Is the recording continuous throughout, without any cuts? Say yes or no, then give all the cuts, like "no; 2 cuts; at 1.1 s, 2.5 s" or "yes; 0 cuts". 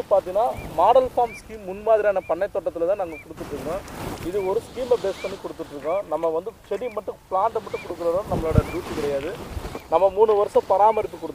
yes; 0 cuts